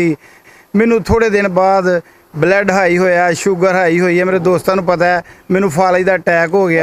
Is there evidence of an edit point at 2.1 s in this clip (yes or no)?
no